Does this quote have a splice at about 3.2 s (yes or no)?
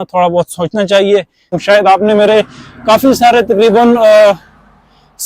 no